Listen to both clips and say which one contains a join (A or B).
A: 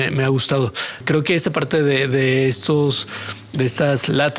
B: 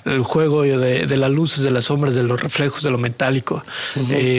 A